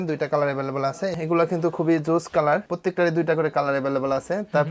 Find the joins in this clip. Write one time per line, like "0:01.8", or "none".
0:01.1
0:02.7